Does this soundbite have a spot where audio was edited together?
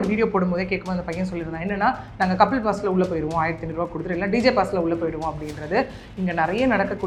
no; 0 cuts

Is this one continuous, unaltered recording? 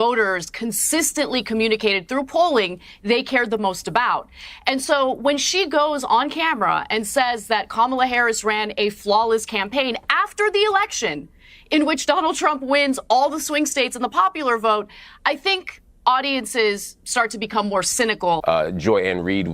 no; 1 cut; at 18.4 s

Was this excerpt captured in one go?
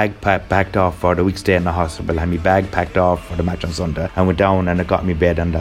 no; 1 cut; at 4.1 s

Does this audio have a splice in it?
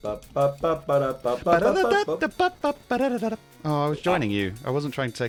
no; 0 cuts

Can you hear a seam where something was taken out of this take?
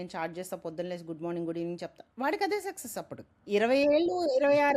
yes; 1 cut; at 3.5 s

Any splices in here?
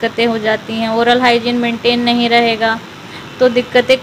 no; 0 cuts

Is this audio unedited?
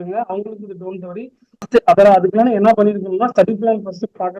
no; 1 cut; at 1.7 s

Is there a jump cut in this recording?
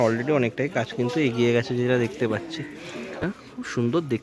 yes; 1 cut; at 3.3 s

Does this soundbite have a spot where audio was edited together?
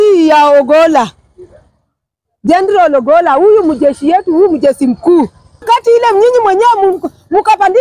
yes; 1 cut; at 5.6 s

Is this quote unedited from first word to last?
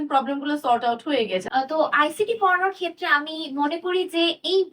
no; 1 cut; at 1.5 s

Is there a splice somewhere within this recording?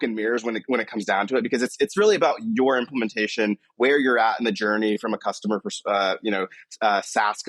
no; 0 cuts

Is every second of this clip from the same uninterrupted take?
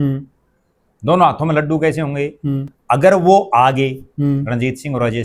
yes; 0 cuts

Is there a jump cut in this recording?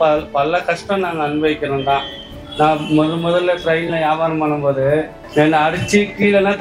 yes; 1 cut; at 2.4 s

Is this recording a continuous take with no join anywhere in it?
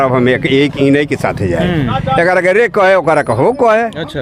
yes; 0 cuts

